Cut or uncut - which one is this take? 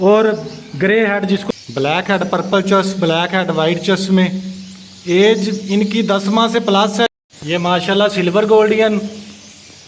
cut